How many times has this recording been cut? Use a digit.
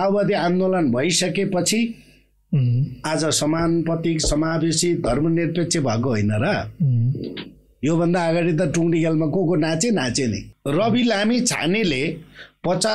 1